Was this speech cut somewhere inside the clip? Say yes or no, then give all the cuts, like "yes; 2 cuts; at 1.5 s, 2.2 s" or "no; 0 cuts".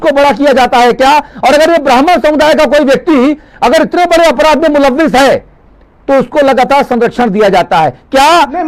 no; 0 cuts